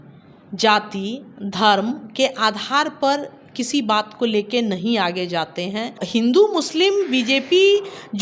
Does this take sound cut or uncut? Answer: cut